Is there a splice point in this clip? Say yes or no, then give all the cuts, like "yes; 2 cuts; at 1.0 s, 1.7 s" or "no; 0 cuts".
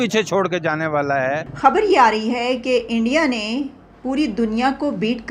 yes; 1 cut; at 1.5 s